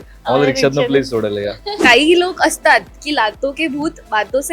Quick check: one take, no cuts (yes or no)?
no